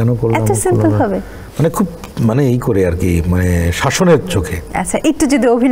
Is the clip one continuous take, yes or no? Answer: yes